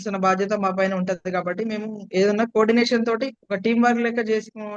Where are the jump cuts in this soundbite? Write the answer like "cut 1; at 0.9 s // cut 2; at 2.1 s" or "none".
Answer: none